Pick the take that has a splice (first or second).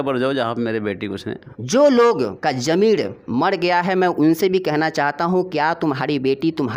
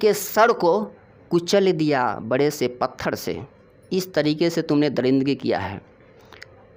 first